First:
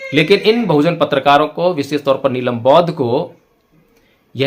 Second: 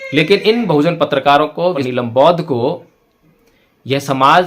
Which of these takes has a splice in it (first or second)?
second